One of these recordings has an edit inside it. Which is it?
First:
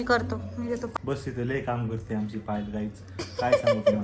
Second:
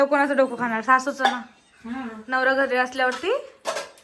first; 1 cut; at 0.9 s

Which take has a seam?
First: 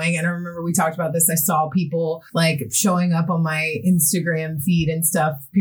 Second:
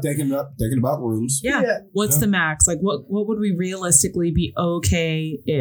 first; 1 cut; at 2.2 s

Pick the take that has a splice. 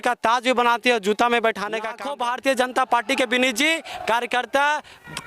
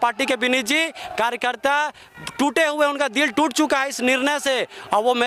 first; 1 cut; at 2.0 s

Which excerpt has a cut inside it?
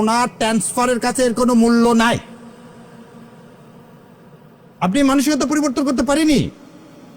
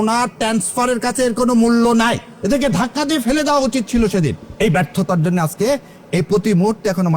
second; 2 cuts; at 2.3 s, 4.4 s

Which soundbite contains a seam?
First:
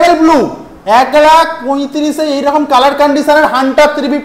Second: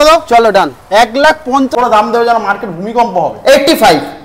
second; 1 cut; at 1.7 s

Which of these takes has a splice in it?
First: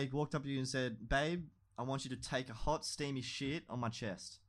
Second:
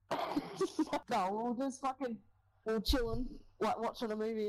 second; 1 cut; at 1.0 s

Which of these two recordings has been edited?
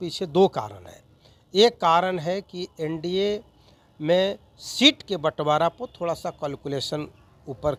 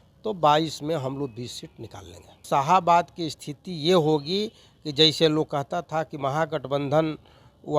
second; 1 cut; at 2.4 s

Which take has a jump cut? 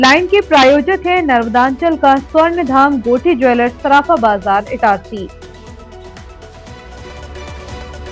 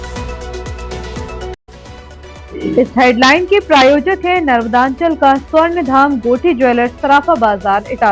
second; 1 cut; at 1.5 s

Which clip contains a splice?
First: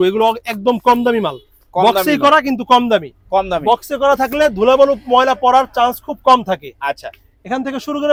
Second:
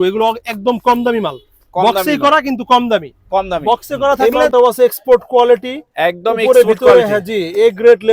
second; 1 cut; at 4.4 s

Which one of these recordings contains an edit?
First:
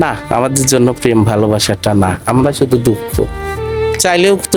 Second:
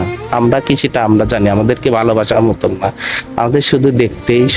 first; 1 cut; at 3.4 s

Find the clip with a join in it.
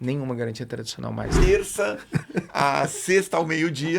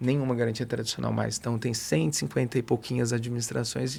first; 1 cut; at 1.4 s

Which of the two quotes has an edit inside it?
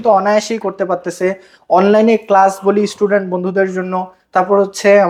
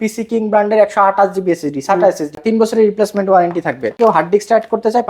second; 2 cuts; at 2.4 s, 3.9 s

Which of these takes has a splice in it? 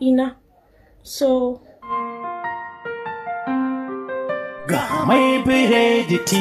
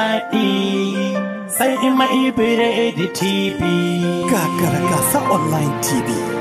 first; 1 cut; at 1.7 s

